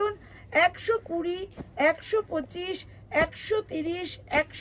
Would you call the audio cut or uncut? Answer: uncut